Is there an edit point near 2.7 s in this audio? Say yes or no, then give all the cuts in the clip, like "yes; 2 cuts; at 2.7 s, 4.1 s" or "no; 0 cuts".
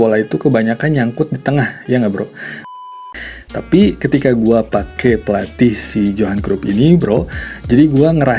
yes; 1 cut; at 2.7 s